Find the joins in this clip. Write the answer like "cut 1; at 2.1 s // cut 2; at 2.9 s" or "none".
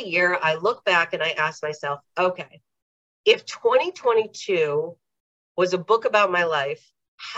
none